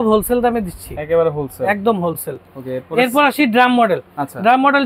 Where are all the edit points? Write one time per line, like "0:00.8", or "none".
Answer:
none